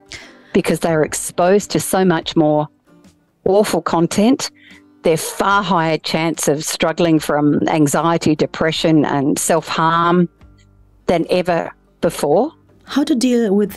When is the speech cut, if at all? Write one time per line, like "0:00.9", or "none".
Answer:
0:12.7